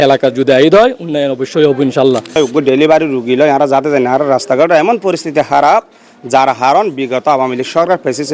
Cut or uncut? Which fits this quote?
cut